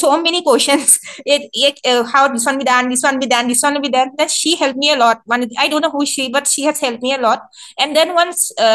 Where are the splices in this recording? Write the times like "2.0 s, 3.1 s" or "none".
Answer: none